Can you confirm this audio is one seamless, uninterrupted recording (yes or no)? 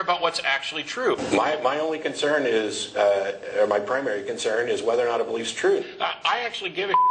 no